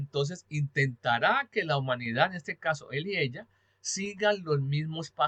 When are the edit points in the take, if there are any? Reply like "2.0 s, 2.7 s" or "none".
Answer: none